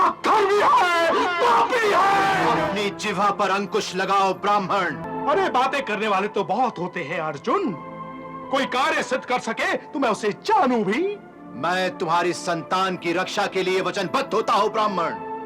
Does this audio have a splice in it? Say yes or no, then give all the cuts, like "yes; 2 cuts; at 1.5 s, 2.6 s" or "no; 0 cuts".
yes; 2 cuts; at 2.5 s, 5.0 s